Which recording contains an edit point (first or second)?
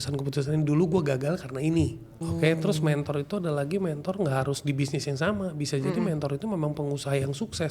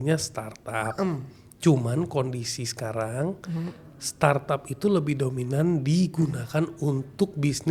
first